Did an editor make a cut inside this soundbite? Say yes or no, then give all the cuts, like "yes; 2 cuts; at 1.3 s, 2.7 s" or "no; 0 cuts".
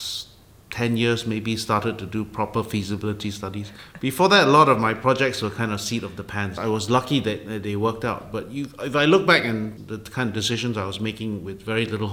yes; 1 cut; at 6.6 s